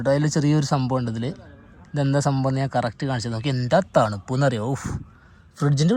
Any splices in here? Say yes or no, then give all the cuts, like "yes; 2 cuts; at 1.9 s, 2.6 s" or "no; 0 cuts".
no; 0 cuts